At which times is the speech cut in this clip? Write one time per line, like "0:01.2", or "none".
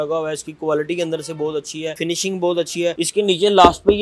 0:01.9
0:03.0

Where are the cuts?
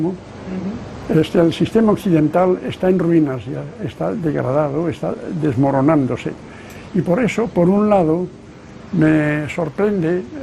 0:07.3

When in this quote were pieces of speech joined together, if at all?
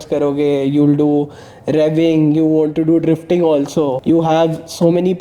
0:04.0

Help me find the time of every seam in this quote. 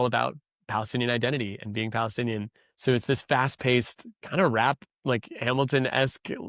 none

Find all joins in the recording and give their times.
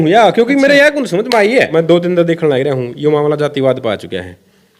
0:01.7

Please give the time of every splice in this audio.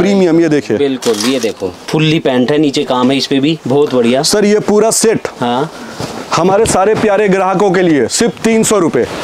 0:01.8

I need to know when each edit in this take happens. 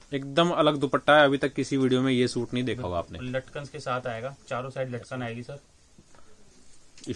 none

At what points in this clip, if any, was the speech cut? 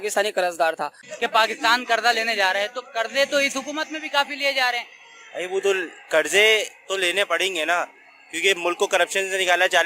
0:01.0

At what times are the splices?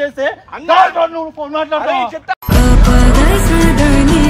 none

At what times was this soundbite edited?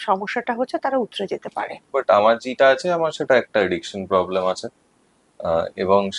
0:01.9

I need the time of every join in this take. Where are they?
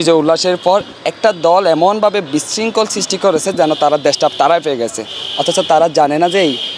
none

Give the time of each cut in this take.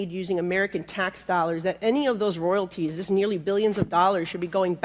none

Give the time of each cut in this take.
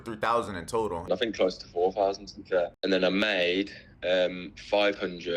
0:01.0
0:02.8

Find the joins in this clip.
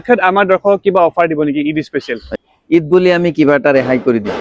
0:02.4

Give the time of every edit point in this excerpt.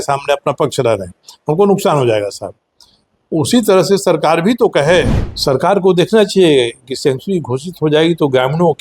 0:05.2

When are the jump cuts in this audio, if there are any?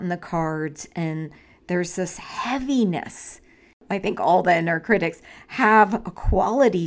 0:03.8

